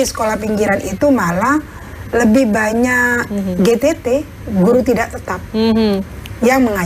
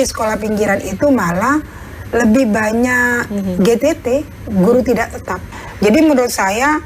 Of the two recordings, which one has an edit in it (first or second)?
second